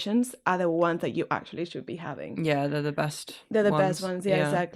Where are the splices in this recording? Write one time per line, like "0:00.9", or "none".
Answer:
none